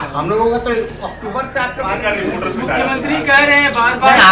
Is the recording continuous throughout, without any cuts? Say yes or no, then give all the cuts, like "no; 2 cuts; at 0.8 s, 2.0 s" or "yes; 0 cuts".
no; 1 cut; at 1.8 s